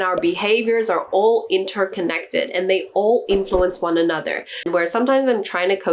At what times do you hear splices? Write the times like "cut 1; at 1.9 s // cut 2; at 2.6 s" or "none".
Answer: cut 1; at 4.6 s